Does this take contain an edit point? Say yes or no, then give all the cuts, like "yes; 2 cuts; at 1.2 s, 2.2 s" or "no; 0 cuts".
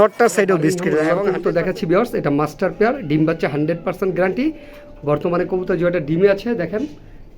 yes; 1 cut; at 1.1 s